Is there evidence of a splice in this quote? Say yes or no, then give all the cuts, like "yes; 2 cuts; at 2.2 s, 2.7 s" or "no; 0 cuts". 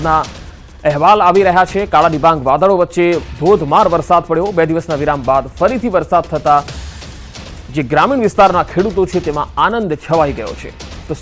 no; 0 cuts